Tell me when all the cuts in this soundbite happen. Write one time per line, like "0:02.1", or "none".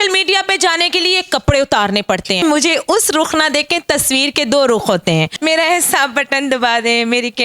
0:02.4
0:05.3